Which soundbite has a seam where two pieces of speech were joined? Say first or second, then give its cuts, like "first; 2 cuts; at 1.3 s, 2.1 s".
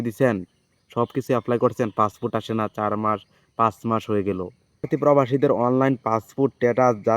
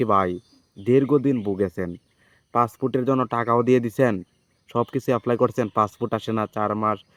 first; 1 cut; at 4.9 s